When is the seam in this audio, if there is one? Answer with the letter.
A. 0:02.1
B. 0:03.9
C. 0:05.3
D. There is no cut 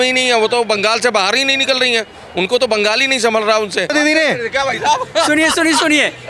B